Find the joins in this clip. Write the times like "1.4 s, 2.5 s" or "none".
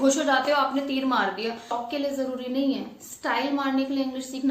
1.7 s

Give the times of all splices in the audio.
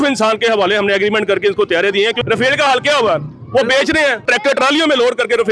2.2 s, 4.2 s

